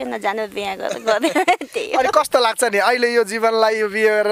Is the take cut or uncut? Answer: uncut